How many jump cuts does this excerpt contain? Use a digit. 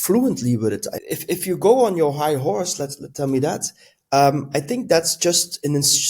1